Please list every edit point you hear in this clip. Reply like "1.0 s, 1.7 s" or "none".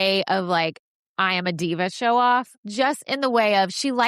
2.6 s